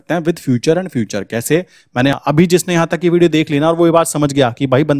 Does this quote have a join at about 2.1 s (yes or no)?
yes